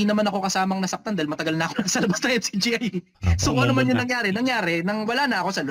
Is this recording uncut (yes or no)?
yes